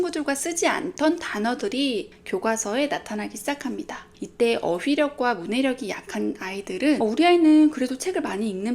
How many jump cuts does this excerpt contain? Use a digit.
1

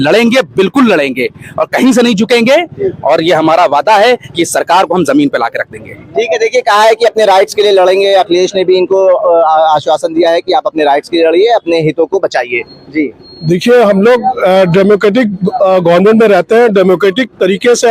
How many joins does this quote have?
0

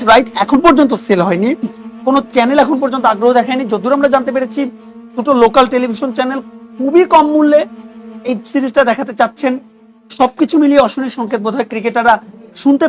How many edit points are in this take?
0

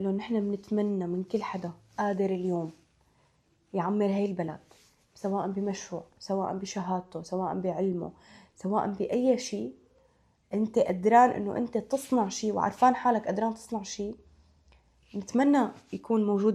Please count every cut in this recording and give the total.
0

